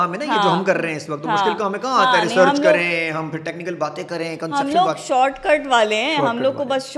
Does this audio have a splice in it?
no; 0 cuts

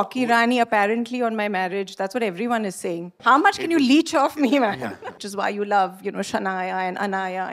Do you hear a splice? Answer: yes; 2 cuts; at 3.2 s, 5.2 s

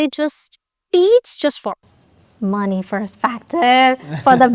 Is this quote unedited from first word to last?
yes; 0 cuts

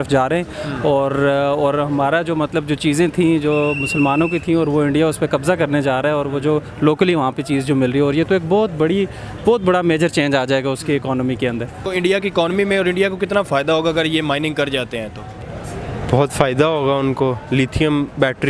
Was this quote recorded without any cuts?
yes; 0 cuts

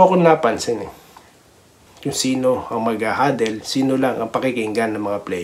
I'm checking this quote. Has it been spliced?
yes; 1 cut; at 1.8 s

